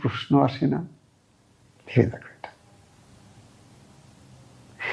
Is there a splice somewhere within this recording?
no; 0 cuts

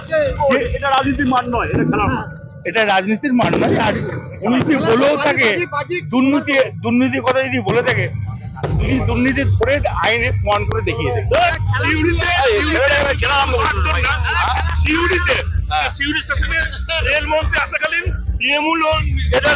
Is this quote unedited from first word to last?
yes; 0 cuts

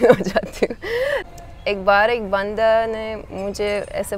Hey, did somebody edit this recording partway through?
yes; 1 cut; at 1.3 s

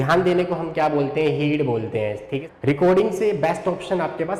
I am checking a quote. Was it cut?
yes; 1 cut; at 2.3 s

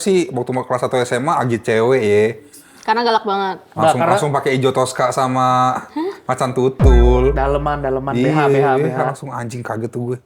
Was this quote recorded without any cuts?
yes; 0 cuts

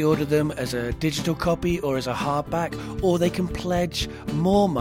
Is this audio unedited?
yes; 0 cuts

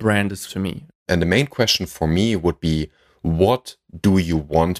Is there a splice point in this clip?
yes; 1 cut; at 1.0 s

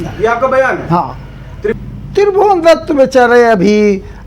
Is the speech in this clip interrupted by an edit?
yes; 1 cut; at 1.8 s

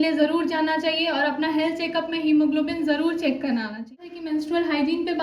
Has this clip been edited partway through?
yes; 1 cut; at 3.9 s

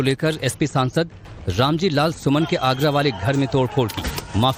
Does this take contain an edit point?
no; 0 cuts

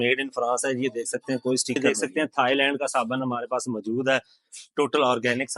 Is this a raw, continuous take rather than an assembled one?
no; 1 cut; at 1.8 s

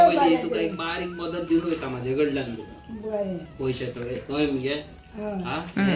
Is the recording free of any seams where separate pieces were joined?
yes; 0 cuts

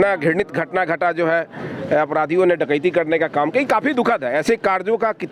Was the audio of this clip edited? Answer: no; 0 cuts

